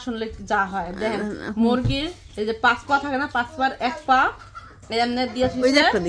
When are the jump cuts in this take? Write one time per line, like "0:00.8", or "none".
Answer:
none